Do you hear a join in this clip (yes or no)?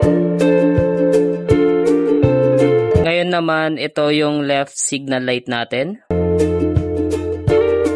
yes